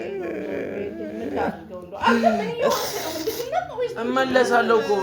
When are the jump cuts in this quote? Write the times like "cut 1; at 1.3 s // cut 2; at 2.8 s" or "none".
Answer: none

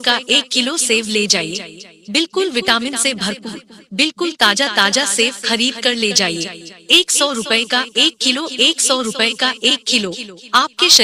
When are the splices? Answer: none

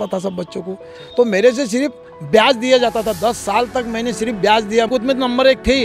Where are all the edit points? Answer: cut 1; at 4.9 s

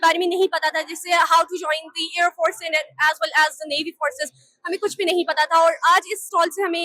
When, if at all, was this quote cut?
none

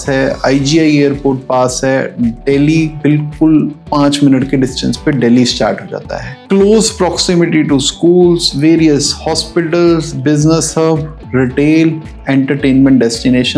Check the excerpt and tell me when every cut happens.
none

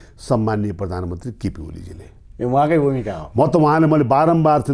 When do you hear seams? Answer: none

